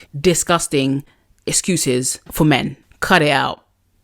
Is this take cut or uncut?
cut